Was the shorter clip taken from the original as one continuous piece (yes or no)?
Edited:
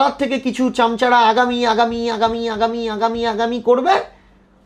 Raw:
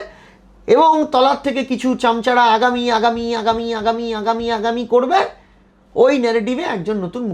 yes